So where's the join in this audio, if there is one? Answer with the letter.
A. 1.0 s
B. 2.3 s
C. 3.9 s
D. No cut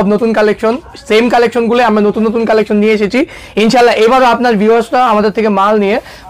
D